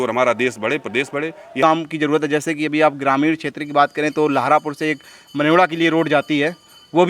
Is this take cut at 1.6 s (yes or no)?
yes